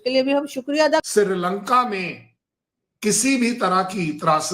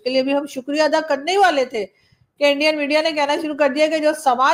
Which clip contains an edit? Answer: first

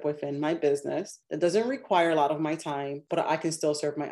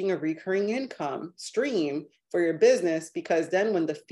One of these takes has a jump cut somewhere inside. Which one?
first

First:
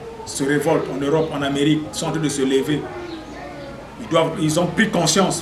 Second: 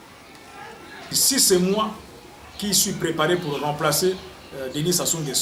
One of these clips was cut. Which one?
second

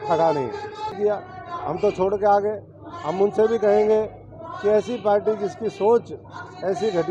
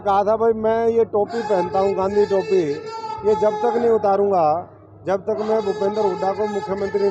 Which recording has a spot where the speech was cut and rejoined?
first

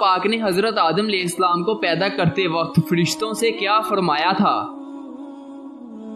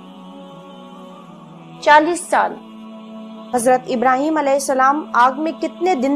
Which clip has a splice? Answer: second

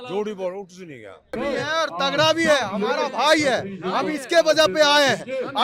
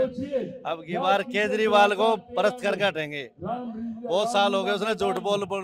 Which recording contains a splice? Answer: first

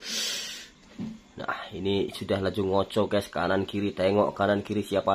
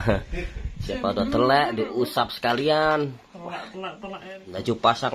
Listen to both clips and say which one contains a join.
second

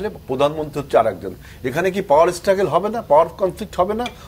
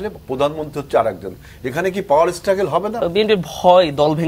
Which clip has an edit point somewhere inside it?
second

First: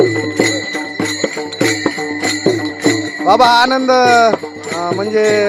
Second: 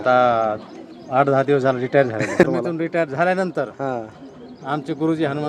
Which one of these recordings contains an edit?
second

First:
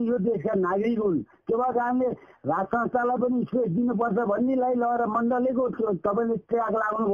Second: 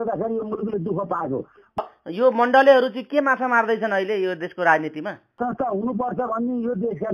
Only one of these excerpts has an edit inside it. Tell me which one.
second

